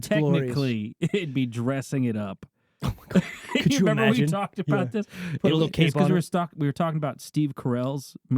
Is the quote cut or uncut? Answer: uncut